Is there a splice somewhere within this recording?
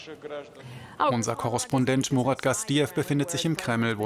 yes; 1 cut; at 2.1 s

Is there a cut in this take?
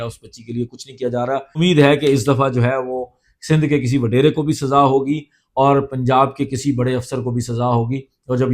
yes; 1 cut; at 1.6 s

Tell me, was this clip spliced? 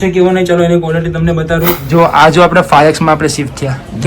yes; 1 cut; at 1.7 s

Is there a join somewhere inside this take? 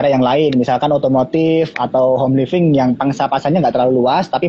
no; 0 cuts

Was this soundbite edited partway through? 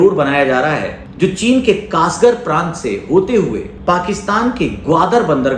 yes; 2 cuts; at 1.0 s, 3.7 s

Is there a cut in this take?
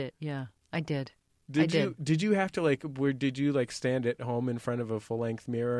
no; 0 cuts

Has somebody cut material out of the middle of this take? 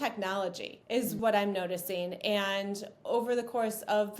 yes; 1 cut; at 1.1 s

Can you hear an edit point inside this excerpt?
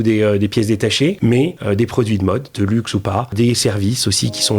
yes; 2 cuts; at 1.4 s, 3.3 s

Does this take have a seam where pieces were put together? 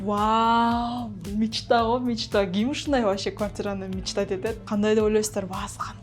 yes; 2 cuts; at 1.2 s, 4.6 s

